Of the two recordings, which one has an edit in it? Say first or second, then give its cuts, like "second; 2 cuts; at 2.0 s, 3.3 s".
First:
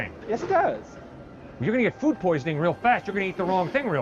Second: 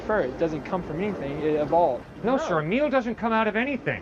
second; 1 cut; at 2.1 s